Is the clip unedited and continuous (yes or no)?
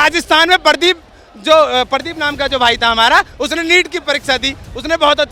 yes